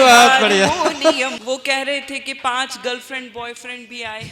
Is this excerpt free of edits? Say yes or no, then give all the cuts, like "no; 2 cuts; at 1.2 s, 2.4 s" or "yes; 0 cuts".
no; 1 cut; at 1.4 s